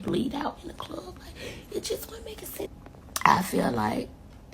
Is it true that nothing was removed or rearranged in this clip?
no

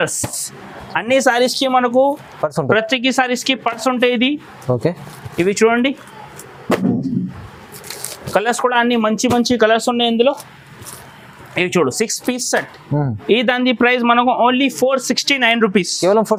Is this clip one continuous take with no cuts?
yes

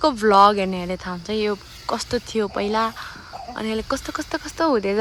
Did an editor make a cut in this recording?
no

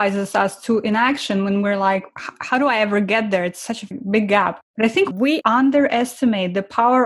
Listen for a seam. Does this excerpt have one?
yes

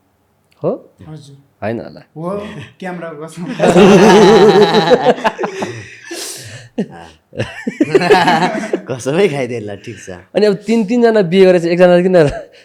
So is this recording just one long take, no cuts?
yes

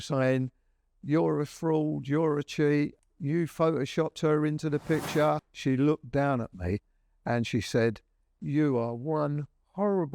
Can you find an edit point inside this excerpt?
yes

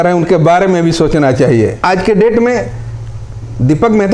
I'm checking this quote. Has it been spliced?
yes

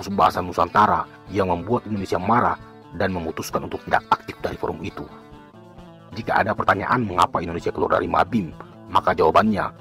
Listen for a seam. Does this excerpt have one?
no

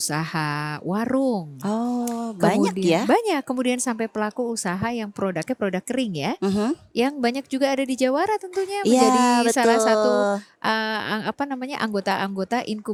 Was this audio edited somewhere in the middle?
no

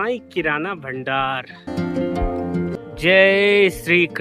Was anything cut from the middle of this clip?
yes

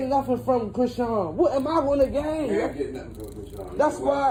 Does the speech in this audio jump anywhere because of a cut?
no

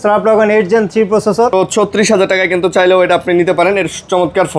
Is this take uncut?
no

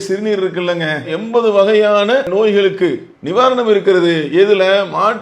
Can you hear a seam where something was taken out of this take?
yes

